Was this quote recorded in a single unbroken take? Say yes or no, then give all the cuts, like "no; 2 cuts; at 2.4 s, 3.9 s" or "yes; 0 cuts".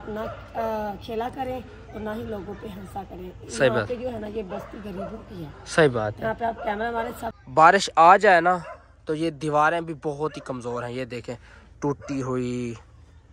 no; 1 cut; at 7.4 s